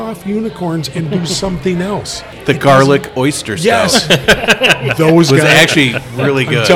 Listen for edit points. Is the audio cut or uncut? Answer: cut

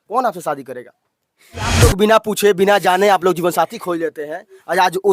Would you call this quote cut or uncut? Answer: cut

